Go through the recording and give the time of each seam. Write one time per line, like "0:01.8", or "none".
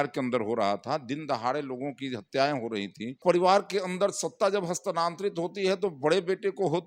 0:03.2